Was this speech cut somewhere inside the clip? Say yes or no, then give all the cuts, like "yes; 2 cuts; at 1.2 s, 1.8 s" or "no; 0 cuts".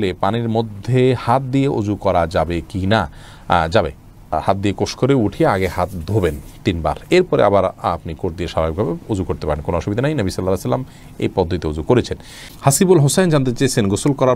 no; 0 cuts